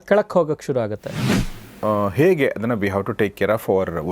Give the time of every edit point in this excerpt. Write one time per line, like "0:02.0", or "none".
0:01.5